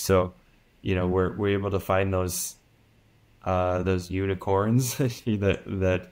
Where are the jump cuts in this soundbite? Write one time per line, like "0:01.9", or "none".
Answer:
none